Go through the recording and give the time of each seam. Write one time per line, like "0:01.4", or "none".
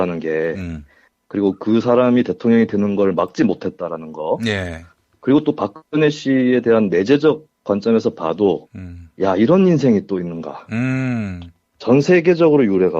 0:11.7